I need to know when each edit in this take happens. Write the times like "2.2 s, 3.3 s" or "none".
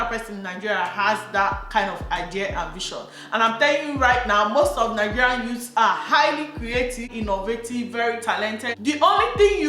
7.1 s, 8.7 s

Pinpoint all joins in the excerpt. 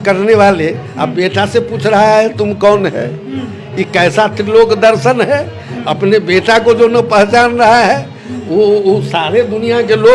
none

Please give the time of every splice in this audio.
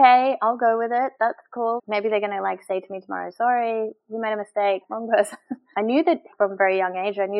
5.5 s, 6.3 s

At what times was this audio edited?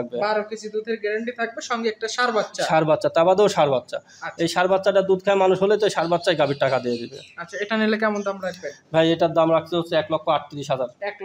none

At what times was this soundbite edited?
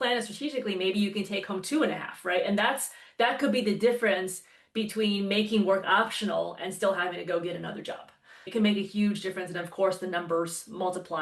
8.5 s

